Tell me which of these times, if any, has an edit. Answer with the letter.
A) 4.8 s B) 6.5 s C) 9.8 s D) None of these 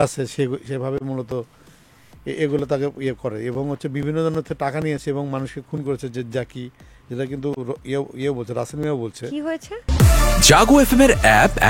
C